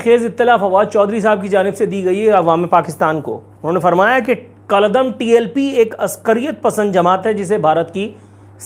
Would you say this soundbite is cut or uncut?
uncut